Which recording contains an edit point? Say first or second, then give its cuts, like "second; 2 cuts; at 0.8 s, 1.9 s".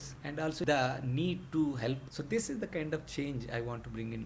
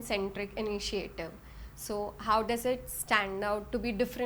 first; 1 cut; at 2.1 s